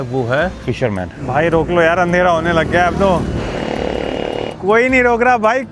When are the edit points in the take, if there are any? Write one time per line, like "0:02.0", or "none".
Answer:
0:00.9
0:03.4
0:04.5